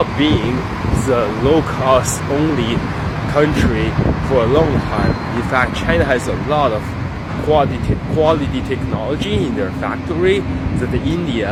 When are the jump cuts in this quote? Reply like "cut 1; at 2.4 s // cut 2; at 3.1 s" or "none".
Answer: none